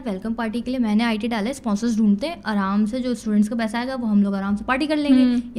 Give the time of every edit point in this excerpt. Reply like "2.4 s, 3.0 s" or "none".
none